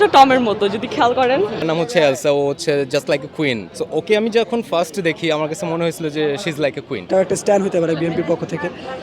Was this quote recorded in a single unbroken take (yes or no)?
no